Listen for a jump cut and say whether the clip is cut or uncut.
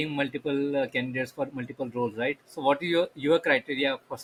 uncut